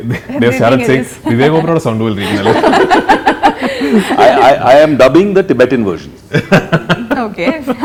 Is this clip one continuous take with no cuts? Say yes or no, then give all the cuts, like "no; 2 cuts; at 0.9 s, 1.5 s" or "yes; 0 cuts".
yes; 0 cuts